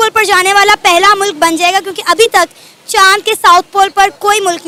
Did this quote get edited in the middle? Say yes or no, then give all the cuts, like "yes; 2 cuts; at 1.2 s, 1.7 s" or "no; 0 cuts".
no; 0 cuts